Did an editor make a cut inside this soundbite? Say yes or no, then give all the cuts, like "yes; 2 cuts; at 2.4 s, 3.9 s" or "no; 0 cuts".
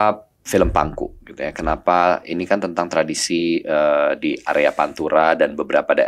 no; 0 cuts